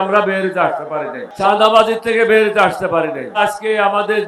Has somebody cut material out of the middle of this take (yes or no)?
yes